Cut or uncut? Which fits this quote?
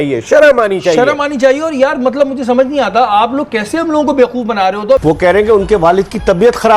cut